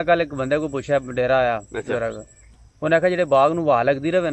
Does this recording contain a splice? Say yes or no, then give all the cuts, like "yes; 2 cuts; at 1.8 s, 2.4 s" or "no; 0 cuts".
no; 0 cuts